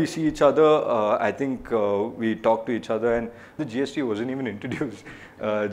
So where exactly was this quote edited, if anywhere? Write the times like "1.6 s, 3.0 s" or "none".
3.6 s